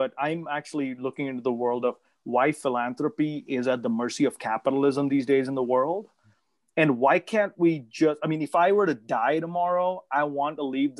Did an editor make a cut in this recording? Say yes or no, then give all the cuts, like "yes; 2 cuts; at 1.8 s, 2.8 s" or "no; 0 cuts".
no; 0 cuts